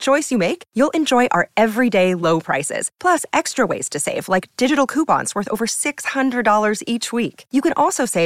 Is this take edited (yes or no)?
no